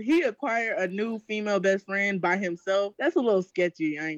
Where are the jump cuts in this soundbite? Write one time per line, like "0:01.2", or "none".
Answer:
0:02.9